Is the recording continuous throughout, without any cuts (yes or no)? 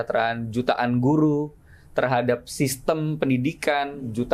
yes